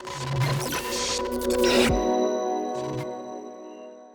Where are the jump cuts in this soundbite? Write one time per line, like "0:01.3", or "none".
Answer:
none